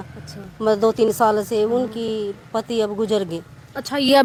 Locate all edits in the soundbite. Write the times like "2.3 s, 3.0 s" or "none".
none